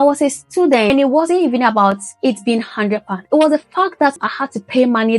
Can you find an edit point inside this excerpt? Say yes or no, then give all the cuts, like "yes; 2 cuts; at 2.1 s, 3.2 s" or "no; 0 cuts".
yes; 2 cuts; at 0.9 s, 4.2 s